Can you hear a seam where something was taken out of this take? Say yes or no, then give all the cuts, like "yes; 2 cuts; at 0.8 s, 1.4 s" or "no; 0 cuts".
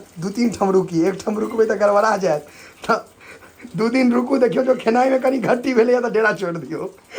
no; 0 cuts